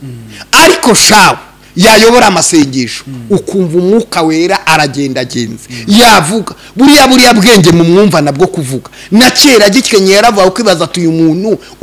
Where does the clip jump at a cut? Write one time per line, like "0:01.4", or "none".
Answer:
none